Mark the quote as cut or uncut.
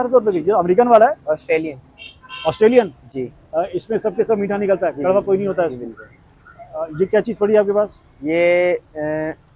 uncut